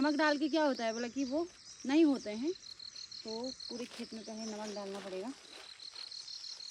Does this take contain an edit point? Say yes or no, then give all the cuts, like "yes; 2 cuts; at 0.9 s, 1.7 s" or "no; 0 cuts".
no; 0 cuts